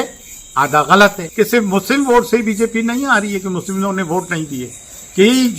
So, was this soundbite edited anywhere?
yes; 1 cut; at 1.2 s

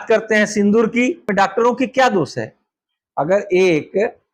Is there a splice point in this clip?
yes; 1 cut; at 1.3 s

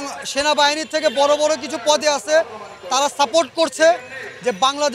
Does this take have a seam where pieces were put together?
no; 0 cuts

